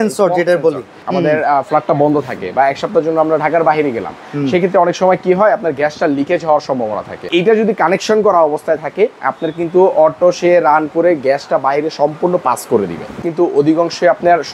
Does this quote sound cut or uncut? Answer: cut